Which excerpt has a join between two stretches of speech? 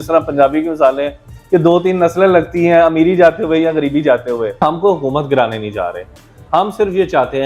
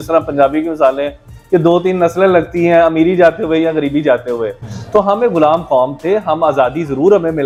first; 1 cut; at 4.6 s

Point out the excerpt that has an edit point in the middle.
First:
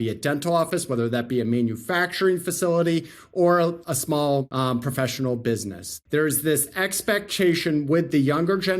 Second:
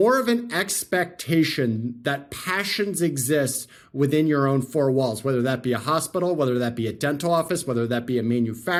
first; 2 cuts; at 4.1 s, 5.9 s

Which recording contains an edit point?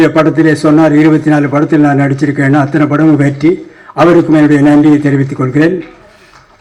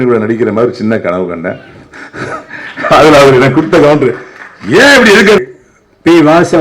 second; 1 cut; at 5.4 s

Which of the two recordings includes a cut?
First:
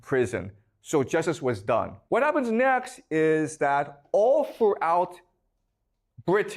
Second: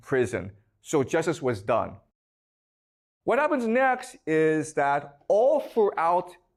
first; 1 cut; at 2.0 s

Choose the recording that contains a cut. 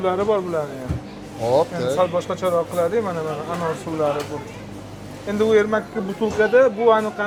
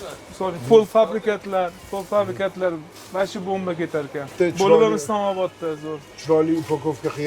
second; 1 cut; at 4.3 s

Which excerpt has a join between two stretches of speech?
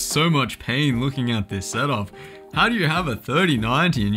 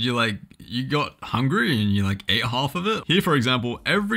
second; 1 cut; at 3.0 s

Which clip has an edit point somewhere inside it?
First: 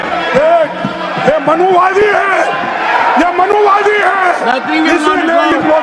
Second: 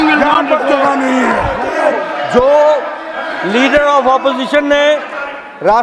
second; 1 cut; at 1.7 s

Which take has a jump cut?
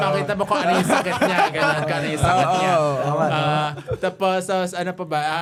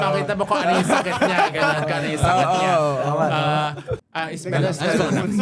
second; 1 cut; at 3.9 s

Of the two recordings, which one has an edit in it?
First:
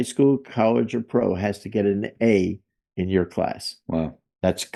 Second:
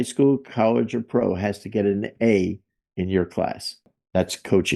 second; 1 cut; at 3.8 s

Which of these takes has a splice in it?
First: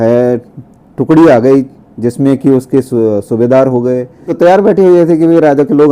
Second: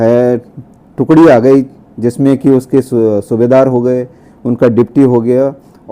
first; 1 cut; at 4.3 s

